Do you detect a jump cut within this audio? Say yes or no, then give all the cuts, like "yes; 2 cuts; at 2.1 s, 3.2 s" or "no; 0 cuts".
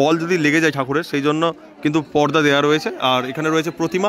no; 0 cuts